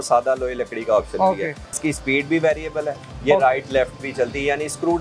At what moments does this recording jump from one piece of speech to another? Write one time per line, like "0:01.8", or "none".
0:01.8

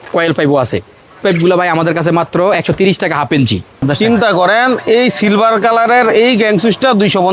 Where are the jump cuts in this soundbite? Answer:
0:01.2
0:03.8

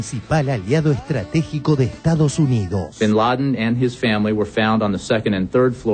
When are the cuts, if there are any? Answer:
0:02.8

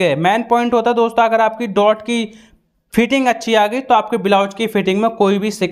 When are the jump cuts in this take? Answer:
none

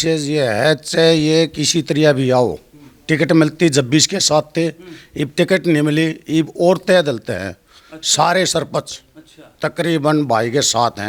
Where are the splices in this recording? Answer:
none

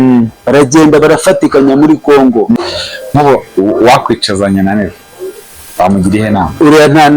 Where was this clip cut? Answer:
0:02.6

